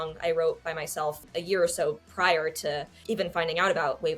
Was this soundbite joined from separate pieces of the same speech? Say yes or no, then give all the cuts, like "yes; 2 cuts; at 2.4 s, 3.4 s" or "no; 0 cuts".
yes; 2 cuts; at 1.2 s, 2.9 s